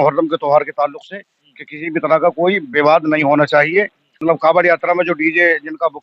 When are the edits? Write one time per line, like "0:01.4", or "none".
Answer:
0:04.2